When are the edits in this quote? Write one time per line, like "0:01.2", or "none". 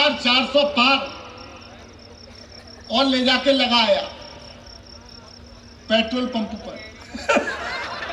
none